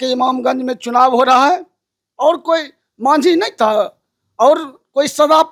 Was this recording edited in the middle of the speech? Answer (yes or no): no